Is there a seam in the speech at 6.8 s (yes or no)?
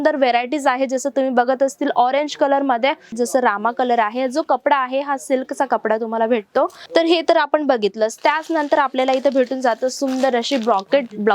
yes